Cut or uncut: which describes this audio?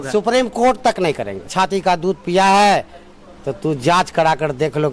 cut